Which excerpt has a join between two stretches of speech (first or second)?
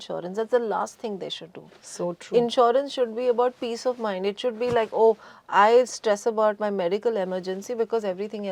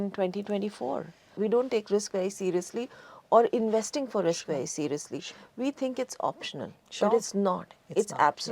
second